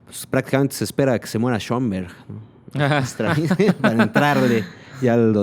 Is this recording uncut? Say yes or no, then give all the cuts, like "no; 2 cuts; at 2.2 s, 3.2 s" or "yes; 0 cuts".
yes; 0 cuts